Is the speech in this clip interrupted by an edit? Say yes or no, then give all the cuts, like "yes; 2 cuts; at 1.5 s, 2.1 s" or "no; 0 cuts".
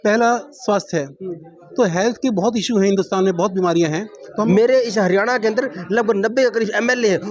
yes; 1 cut; at 4.2 s